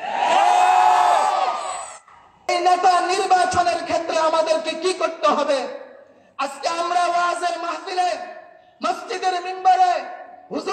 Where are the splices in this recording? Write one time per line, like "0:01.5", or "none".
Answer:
0:02.5